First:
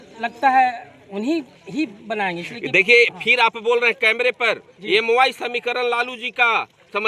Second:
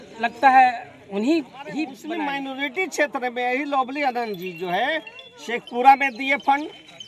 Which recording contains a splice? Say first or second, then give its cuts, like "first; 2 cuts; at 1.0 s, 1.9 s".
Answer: second; 1 cut; at 1.9 s